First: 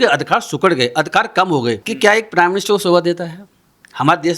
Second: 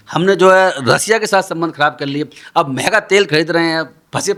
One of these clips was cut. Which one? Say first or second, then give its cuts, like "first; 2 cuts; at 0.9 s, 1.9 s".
first; 1 cut; at 1.9 s